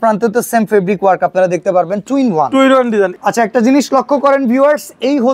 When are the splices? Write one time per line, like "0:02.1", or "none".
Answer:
0:03.1